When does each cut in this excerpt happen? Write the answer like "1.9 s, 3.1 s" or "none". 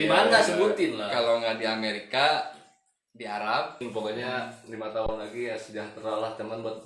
3.8 s

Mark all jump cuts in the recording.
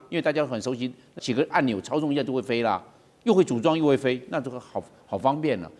1.1 s

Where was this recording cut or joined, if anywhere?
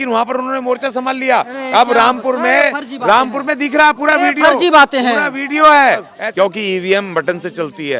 6.2 s

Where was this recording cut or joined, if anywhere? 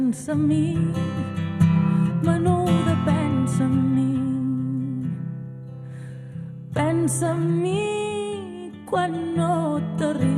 8.3 s

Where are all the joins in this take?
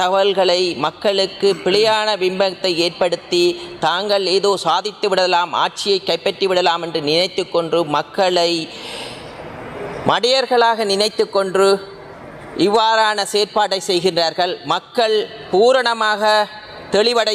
none

